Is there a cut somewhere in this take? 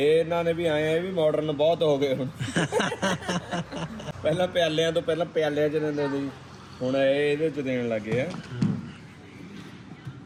no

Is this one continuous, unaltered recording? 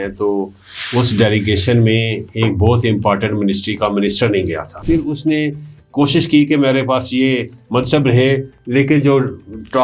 no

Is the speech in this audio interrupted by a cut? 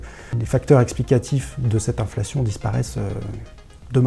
no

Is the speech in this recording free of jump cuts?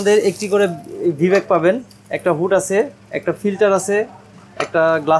yes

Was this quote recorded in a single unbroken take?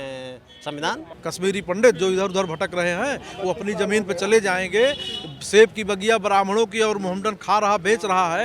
no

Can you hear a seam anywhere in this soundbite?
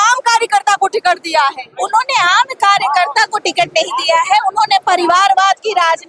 no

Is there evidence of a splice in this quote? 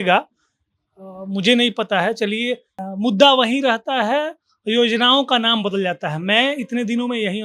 yes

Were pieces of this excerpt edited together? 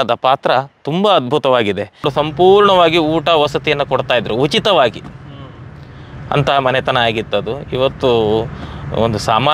yes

